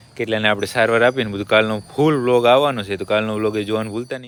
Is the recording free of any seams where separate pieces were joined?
yes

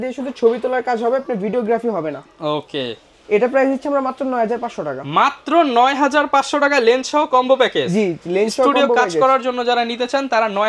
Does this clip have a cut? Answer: no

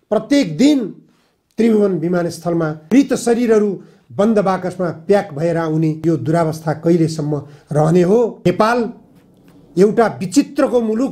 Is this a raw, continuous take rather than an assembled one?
no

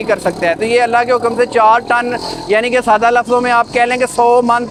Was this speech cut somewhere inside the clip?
no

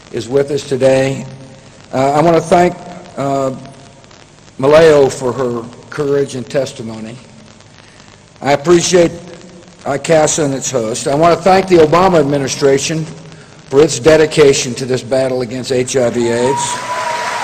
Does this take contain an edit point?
no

